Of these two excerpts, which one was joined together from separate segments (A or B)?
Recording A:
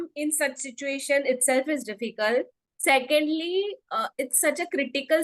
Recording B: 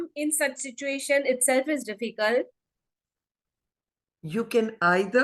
B